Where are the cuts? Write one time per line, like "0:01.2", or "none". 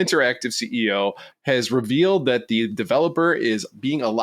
0:01.3